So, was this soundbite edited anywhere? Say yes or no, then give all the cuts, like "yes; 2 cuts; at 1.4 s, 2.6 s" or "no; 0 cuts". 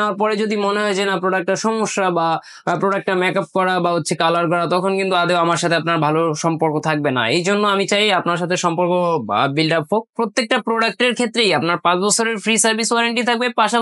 yes; 1 cut; at 10.1 s